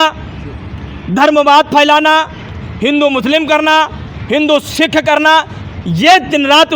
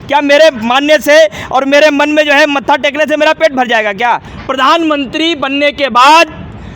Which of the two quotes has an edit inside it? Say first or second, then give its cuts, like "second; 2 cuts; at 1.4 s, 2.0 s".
second; 1 cut; at 4.3 s